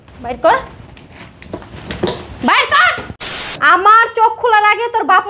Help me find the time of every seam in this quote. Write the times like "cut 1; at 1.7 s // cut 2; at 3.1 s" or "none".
cut 1; at 3.5 s